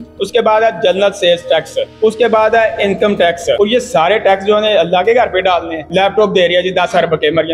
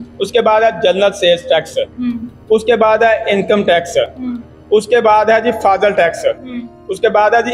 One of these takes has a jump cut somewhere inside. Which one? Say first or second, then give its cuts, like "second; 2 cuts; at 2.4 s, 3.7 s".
first; 3 cuts; at 1.8 s, 3.6 s, 5.9 s